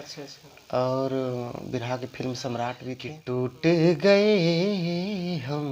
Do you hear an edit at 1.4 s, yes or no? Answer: no